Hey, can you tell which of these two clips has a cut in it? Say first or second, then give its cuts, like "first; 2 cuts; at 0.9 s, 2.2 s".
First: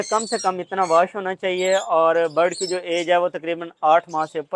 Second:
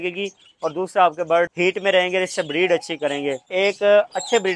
second; 2 cuts; at 1.5 s, 3.4 s